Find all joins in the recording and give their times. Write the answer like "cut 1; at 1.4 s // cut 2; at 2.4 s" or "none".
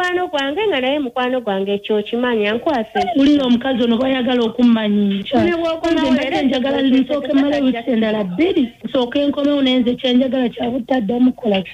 none